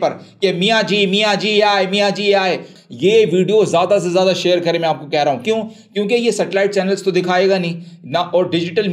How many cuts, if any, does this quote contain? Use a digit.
1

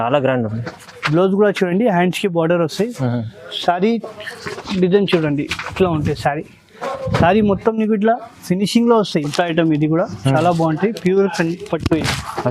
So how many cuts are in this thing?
1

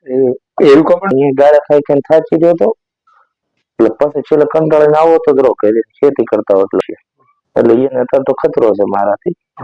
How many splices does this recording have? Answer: 2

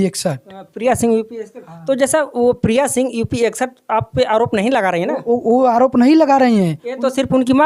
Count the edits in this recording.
0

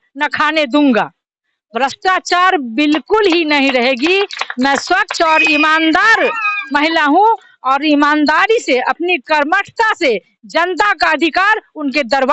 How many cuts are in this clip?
0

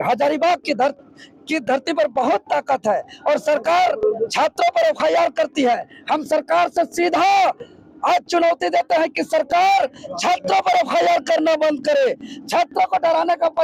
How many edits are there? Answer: 0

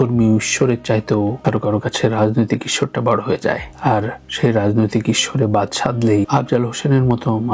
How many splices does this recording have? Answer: 0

